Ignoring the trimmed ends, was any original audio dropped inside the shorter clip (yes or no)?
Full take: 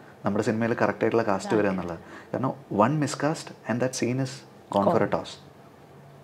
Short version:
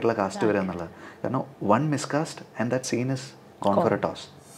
no